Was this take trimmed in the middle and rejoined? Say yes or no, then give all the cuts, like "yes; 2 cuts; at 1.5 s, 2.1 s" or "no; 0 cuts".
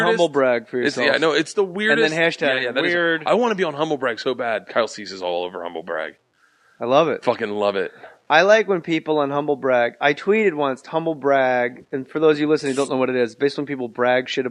no; 0 cuts